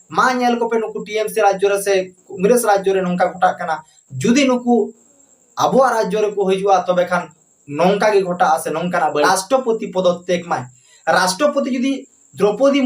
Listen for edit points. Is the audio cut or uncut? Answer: cut